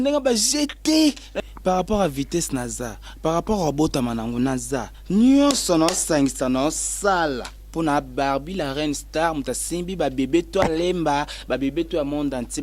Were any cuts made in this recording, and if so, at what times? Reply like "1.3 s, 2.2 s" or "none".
1.4 s